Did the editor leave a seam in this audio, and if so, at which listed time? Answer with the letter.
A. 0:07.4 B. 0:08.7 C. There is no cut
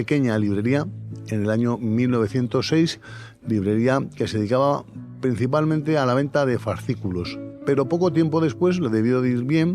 A